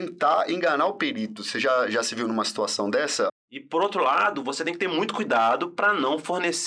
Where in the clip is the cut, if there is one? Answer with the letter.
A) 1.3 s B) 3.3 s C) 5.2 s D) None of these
B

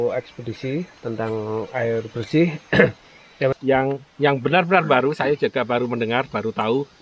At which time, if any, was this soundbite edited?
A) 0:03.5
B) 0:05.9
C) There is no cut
A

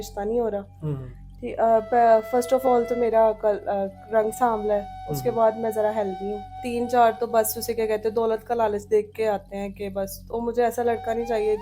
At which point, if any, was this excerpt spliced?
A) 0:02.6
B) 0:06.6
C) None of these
B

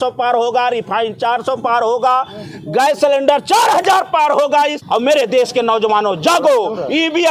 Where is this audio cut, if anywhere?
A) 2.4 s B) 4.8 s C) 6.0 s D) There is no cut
B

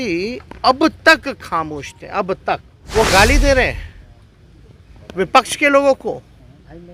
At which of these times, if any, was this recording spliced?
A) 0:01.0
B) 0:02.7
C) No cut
B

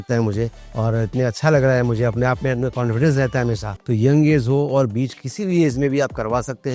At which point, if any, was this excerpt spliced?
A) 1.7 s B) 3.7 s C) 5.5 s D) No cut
B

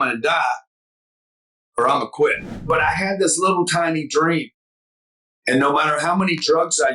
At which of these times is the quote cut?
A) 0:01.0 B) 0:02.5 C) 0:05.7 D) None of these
B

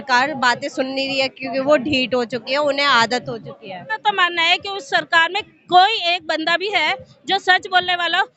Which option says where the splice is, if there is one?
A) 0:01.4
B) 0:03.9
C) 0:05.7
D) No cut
B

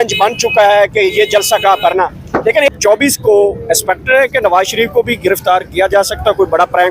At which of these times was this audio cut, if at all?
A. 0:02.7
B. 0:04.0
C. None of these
A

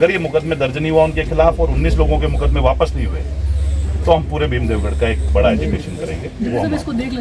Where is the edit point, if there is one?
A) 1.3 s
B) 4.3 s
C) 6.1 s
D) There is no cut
D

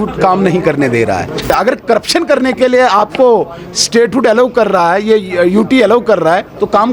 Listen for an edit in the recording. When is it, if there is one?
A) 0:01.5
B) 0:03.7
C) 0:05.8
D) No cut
A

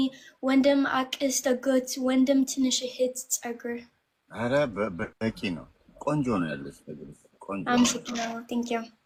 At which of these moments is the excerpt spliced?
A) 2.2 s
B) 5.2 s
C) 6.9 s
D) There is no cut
D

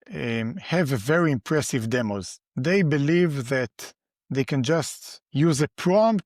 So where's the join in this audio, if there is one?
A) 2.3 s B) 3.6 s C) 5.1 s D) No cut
D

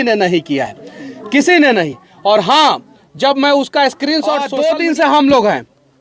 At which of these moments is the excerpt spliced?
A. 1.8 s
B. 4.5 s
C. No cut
B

